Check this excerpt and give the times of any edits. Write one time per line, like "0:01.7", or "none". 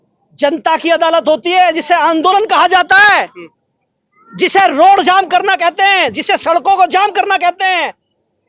none